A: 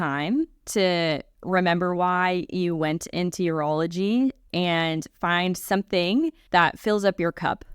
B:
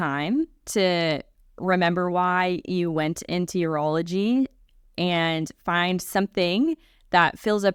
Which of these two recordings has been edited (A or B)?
A